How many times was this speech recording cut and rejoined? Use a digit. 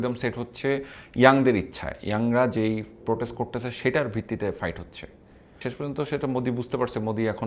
1